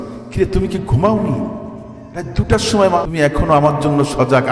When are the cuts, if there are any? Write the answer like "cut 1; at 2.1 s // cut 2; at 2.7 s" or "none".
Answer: cut 1; at 3.1 s